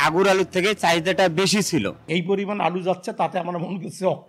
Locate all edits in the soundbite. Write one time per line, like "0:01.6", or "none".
0:02.0